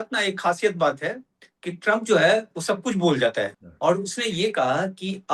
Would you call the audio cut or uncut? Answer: cut